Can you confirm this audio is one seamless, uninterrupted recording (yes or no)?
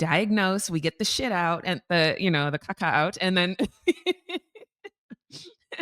no